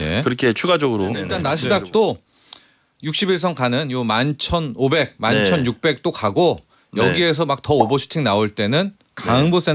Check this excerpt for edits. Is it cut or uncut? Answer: cut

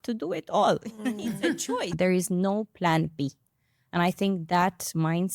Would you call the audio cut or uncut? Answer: cut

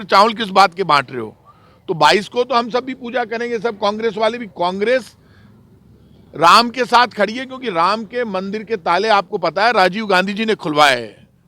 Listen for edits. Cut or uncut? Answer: uncut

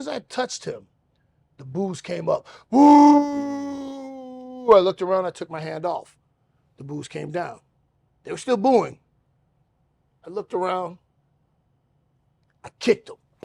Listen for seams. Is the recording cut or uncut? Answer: uncut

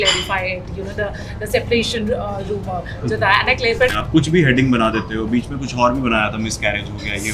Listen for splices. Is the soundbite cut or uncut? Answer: cut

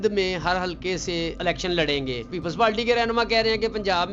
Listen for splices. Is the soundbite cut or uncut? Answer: cut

